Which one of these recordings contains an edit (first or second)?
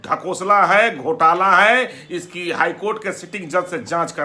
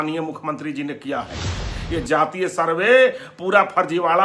second